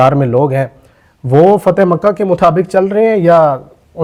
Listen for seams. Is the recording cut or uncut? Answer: uncut